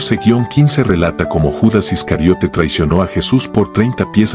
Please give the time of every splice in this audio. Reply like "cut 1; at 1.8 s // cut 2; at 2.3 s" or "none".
none